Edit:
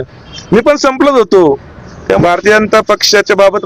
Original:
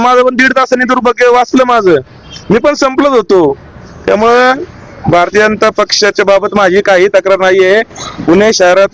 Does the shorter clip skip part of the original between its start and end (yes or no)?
yes